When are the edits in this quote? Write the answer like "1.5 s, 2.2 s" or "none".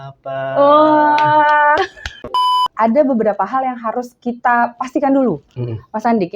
2.6 s